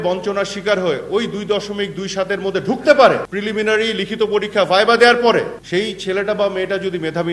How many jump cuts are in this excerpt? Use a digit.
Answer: 2